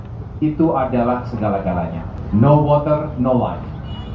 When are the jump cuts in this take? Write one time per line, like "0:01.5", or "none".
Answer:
0:02.1